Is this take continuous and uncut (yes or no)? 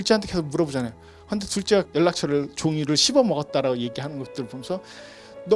no